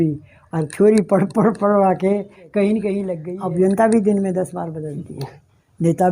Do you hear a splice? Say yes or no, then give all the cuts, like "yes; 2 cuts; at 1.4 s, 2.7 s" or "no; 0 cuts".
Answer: yes; 1 cut; at 3.2 s